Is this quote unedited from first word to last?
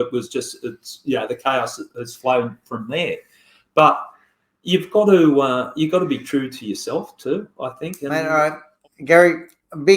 no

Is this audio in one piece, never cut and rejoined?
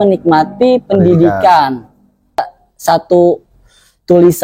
no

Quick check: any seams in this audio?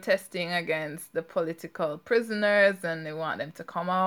no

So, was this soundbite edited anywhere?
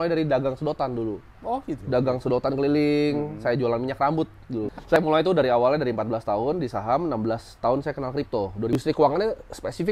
yes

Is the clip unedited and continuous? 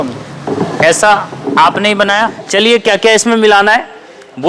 no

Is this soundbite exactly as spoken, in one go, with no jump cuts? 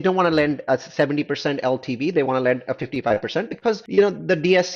no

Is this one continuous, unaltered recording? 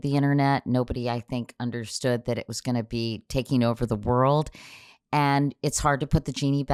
yes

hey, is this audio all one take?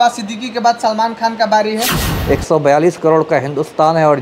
no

